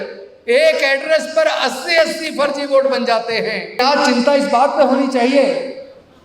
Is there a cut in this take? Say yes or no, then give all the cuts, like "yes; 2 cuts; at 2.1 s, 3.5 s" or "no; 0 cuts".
yes; 1 cut; at 3.8 s